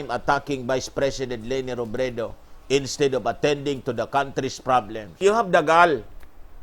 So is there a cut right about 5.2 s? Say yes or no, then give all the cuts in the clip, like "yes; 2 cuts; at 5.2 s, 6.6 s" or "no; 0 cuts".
yes; 1 cut; at 5.2 s